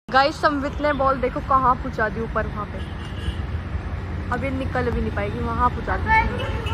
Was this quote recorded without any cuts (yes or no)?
yes